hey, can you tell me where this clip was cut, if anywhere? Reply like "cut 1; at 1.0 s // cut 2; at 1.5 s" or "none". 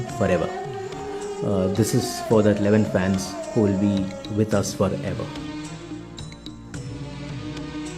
cut 1; at 5.2 s